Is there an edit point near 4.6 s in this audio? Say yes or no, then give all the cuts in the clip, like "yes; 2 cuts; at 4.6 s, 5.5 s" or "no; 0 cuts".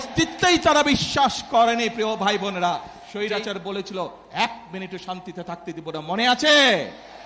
no; 1 cut; at 3.0 s